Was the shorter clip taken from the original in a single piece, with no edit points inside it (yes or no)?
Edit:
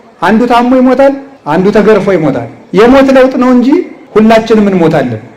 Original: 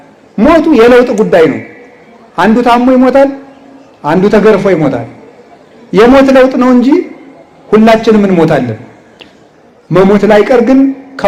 no